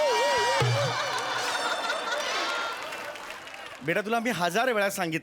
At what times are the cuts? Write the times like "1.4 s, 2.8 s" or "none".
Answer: none